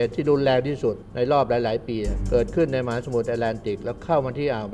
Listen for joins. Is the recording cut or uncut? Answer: cut